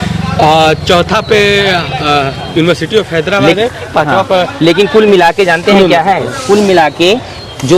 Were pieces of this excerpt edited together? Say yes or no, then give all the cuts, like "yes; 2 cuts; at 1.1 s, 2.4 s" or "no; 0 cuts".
no; 0 cuts